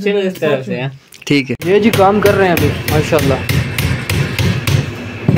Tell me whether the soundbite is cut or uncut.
cut